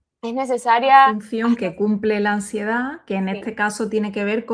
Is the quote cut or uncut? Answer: cut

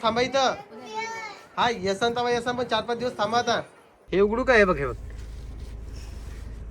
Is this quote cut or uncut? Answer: cut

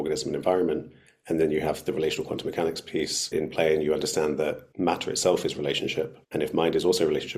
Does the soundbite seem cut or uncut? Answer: cut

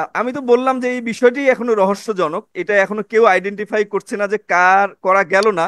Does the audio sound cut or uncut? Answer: uncut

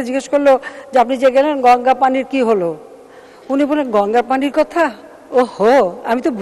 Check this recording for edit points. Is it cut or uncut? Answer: uncut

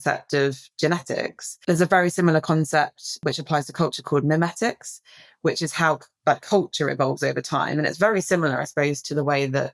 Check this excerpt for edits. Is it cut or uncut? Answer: cut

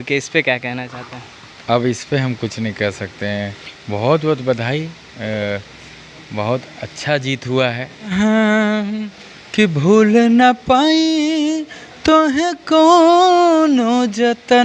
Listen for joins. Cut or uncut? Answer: cut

